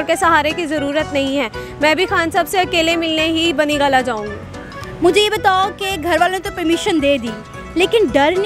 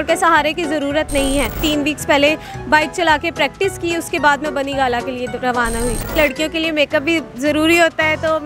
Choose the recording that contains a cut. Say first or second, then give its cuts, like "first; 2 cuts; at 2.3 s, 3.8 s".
second; 2 cuts; at 1.6 s, 6.1 s